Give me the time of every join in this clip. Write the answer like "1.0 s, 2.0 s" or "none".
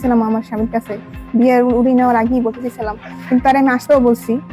none